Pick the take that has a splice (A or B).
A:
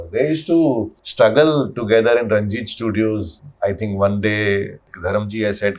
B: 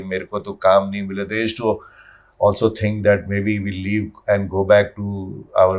A